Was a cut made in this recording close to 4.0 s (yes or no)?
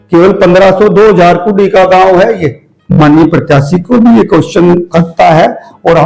no